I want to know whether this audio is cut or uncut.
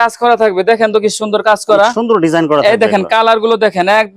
uncut